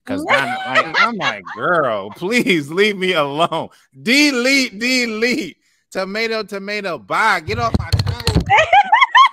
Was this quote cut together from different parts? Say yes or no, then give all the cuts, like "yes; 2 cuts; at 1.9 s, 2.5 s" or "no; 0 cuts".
no; 0 cuts